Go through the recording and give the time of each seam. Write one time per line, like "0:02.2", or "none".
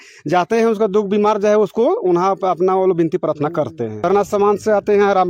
0:04.0